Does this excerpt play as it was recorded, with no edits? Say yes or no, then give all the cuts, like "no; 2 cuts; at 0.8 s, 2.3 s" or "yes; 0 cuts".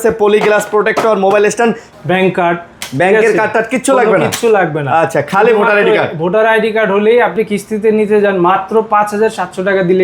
no; 2 cuts; at 1.9 s, 7.3 s